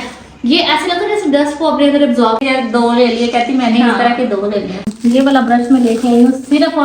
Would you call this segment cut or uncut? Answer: cut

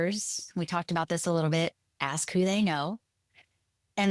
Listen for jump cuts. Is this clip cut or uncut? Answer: uncut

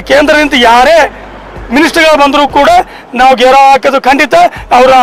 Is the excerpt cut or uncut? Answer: uncut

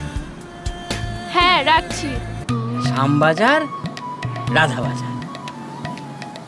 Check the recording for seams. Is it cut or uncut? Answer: cut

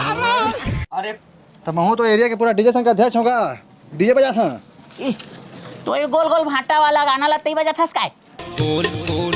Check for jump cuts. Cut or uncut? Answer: cut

